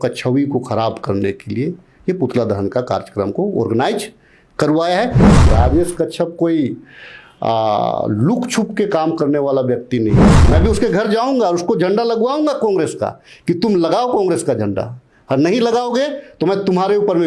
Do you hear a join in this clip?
yes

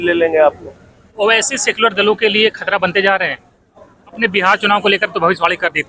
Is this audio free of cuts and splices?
no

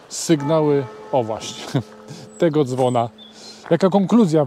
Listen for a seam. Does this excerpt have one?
yes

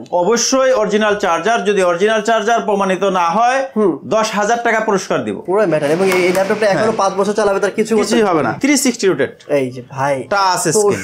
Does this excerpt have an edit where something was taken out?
yes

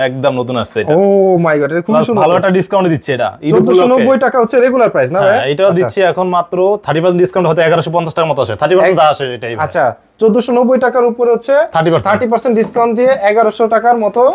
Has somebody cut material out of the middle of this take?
no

